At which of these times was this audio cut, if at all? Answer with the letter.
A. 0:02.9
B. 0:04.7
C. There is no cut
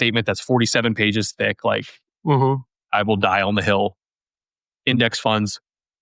A